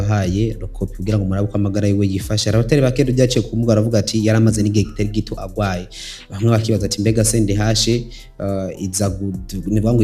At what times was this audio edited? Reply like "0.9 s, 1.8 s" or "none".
none